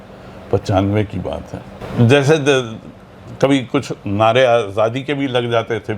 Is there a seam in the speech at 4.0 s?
no; 1 cut; at 1.7 s

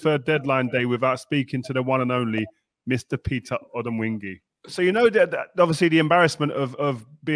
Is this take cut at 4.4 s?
yes; 1 cut; at 4.4 s

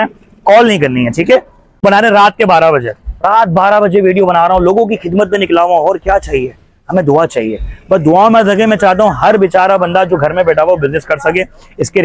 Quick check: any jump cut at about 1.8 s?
yes; 1 cut; at 1.8 s

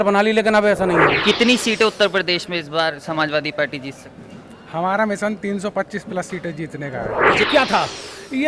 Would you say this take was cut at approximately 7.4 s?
yes; 2 cuts; at 1.1 s, 7.4 s

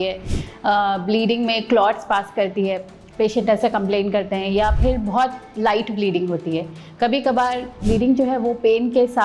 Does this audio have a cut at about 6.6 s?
no; 1 cut; at 7.8 s

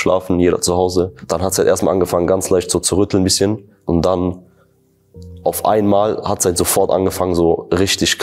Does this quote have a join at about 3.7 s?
yes; 2 cuts; at 1.2 s, 3.7 s

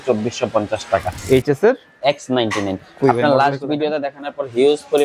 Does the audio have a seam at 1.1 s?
yes; 1 cut; at 1.1 s

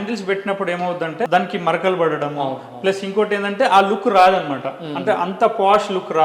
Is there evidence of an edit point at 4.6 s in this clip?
no; 1 cut; at 1.3 s

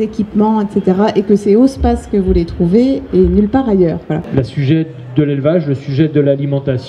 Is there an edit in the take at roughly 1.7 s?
no; 1 cut; at 4.2 s

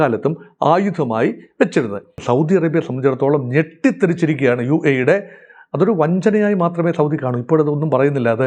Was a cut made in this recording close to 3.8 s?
no; 1 cut; at 2.2 s

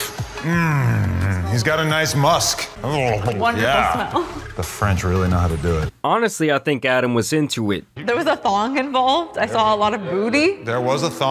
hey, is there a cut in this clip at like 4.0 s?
no; 0 cuts

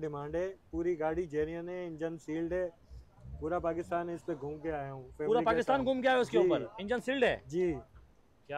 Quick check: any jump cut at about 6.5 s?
no; 0 cuts

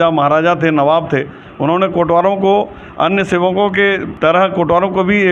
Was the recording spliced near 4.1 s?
yes; 1 cut; at 4.1 s

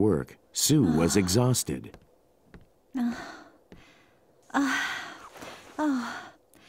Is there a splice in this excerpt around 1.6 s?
yes; 1 cut; at 1.6 s

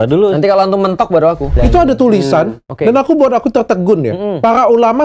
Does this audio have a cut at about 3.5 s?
no; 1 cut; at 1.5 s

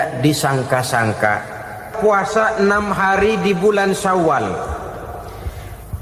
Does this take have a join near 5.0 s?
no; 1 cut; at 1.9 s

